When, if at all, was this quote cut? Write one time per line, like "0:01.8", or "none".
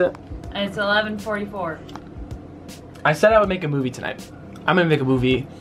none